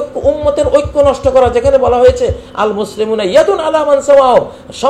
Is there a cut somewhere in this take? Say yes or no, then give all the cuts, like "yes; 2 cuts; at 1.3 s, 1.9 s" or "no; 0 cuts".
no; 0 cuts